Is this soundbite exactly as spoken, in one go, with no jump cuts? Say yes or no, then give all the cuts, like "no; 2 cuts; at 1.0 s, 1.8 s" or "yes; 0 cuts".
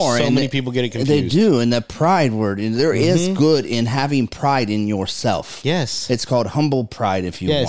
yes; 0 cuts